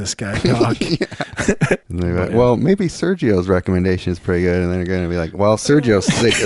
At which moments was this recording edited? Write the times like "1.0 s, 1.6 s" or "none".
1.9 s